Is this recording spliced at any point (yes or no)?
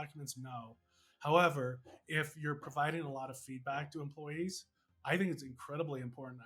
no